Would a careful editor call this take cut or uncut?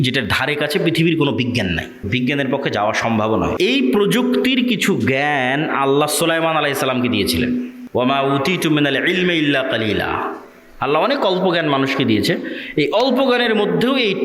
cut